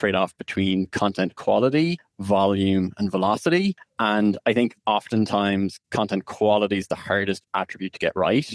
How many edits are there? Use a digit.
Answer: 2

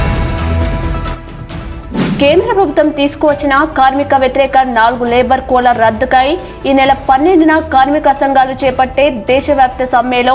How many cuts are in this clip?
1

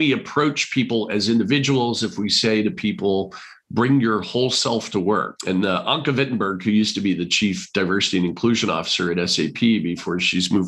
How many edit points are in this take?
1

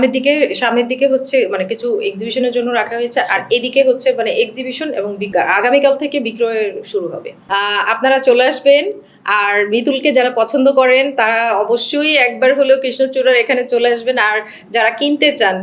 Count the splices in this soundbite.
0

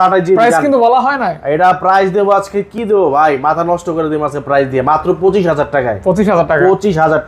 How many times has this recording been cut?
0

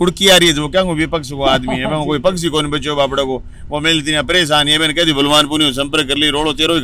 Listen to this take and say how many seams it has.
0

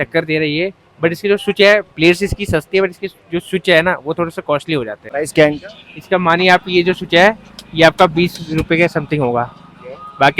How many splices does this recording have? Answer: 1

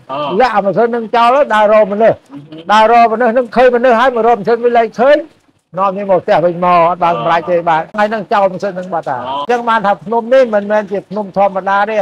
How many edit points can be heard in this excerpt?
2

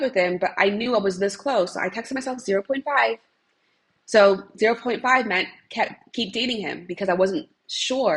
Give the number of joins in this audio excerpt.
0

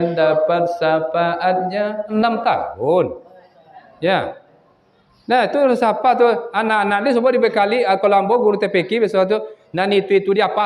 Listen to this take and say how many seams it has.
1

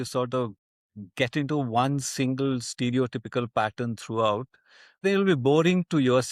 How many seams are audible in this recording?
1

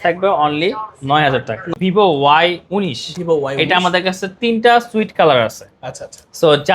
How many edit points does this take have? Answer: 1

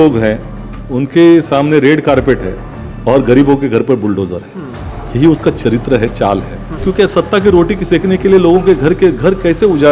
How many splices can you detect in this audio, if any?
1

